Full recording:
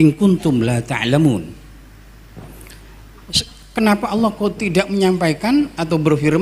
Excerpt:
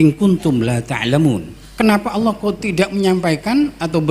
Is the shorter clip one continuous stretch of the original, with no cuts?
no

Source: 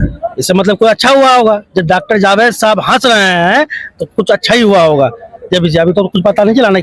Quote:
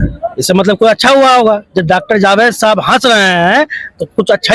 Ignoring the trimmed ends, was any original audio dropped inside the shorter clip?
no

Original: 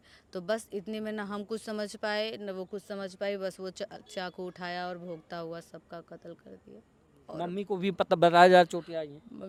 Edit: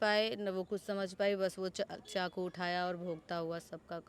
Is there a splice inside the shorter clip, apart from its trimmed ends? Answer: no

